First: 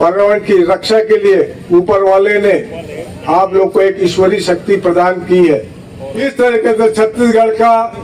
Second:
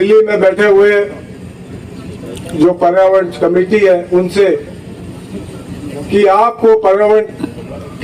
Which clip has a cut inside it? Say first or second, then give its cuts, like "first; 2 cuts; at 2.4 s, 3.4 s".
first; 1 cut; at 6.1 s